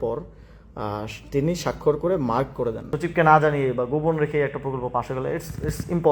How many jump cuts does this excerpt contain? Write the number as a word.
one